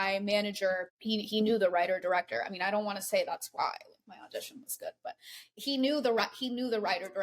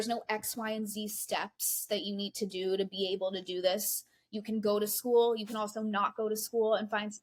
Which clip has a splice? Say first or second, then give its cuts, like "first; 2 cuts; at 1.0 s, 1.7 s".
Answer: first; 1 cut; at 0.9 s